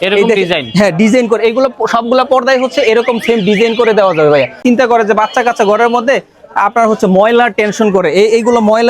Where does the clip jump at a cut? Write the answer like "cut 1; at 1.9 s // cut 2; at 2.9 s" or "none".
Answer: cut 1; at 4.6 s